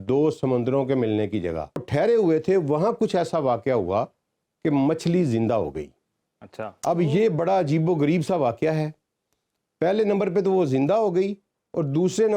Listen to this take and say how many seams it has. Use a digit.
1